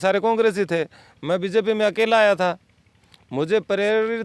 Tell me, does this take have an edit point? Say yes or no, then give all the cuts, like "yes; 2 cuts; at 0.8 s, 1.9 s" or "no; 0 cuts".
no; 0 cuts